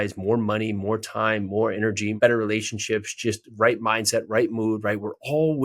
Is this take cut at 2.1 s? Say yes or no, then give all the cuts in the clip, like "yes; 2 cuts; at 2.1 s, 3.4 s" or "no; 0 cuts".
yes; 1 cut; at 2.1 s